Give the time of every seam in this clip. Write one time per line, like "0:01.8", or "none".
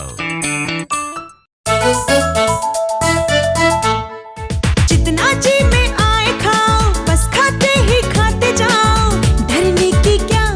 0:01.5